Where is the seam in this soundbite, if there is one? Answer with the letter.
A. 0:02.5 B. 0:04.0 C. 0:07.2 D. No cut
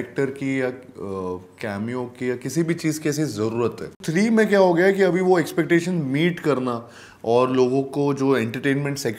B